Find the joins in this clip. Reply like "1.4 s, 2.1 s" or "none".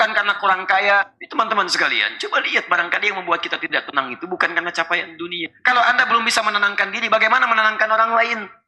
1.1 s, 5.4 s